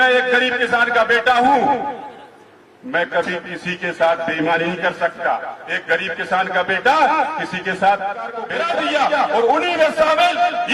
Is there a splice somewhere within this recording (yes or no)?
yes